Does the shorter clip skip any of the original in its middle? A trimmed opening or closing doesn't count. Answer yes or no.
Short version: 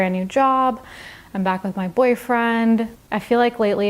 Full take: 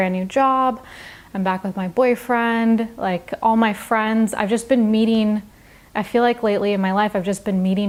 yes